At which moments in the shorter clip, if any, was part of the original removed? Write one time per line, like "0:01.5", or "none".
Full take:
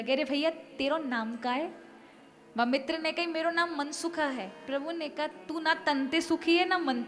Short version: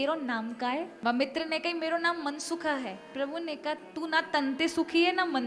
0:00.9